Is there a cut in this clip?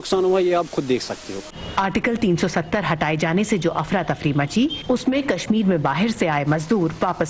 no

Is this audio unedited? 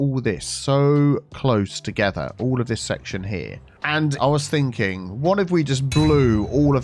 no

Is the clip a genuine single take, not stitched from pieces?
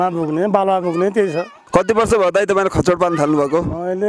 no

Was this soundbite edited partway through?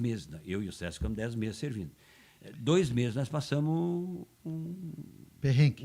no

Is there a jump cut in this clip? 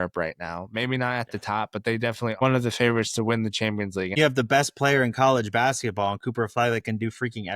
yes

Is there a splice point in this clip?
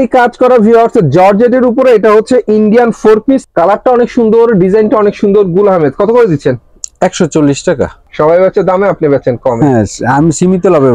yes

